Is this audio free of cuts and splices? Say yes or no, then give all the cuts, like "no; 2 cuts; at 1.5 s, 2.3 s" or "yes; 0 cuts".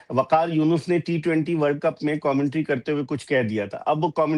yes; 0 cuts